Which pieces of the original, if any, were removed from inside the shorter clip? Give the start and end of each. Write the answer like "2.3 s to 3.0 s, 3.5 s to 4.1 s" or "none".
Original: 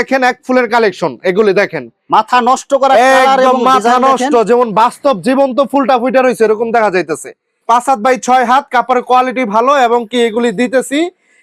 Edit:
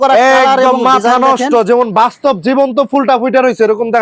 none

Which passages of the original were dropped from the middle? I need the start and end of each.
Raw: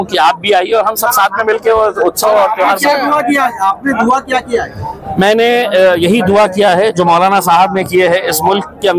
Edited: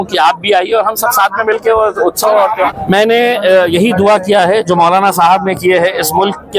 2.7 s to 5.0 s

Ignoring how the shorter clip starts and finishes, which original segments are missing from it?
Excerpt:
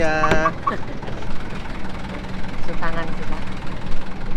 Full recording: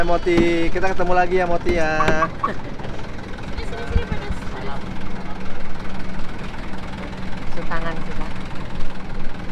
3.1 s to 6.2 s

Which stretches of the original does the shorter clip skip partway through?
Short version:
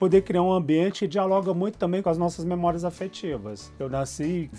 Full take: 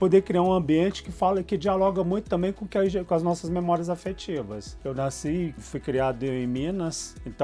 1.0 s to 1.5 s, 2.5 s to 3.1 s

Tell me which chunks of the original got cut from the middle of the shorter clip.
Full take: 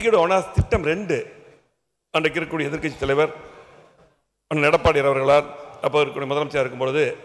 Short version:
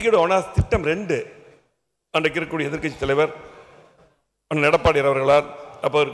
none

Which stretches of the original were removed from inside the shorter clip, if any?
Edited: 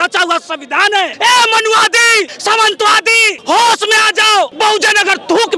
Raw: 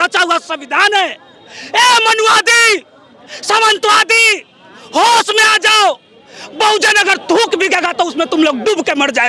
1.1 s to 1.7 s, 2.9 s to 3.4 s, 4.4 s to 4.8 s, 6.0 s to 6.5 s

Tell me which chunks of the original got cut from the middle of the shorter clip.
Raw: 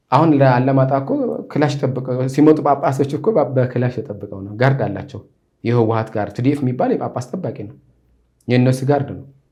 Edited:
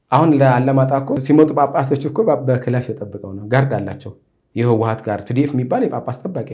1.2 s to 2.3 s

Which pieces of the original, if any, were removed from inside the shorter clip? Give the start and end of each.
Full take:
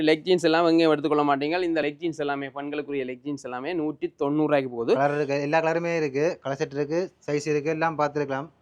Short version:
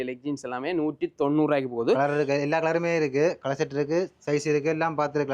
none

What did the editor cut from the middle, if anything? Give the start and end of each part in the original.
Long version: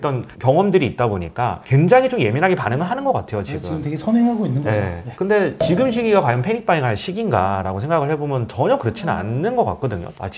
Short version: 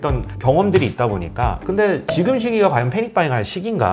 1.6 s to 5.1 s

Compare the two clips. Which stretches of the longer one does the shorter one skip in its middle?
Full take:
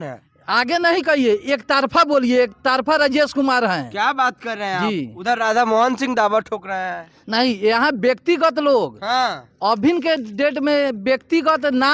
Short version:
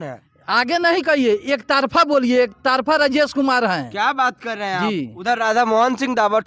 none

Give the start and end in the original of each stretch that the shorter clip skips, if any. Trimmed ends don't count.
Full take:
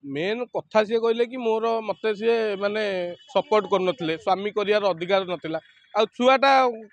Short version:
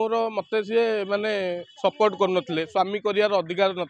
none

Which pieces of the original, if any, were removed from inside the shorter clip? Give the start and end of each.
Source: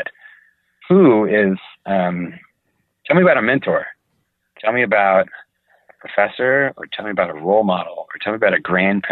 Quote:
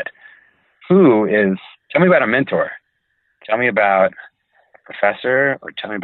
1.7 s to 2.9 s

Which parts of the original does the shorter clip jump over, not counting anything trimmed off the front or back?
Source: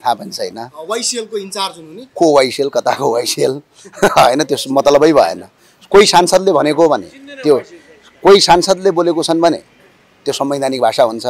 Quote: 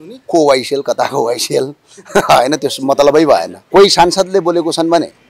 5.4 s to 8.1 s

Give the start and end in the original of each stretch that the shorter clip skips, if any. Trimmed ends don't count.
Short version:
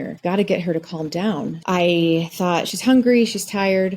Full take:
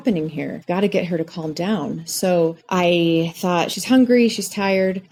2.0 s to 2.6 s

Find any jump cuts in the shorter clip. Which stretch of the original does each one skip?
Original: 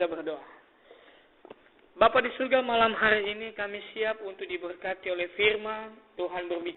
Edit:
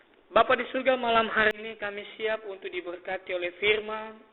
3.2 s to 3.3 s

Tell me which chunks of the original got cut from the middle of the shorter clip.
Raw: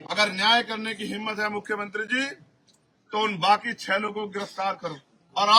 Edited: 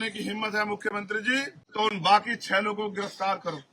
2.4 s to 3.0 s

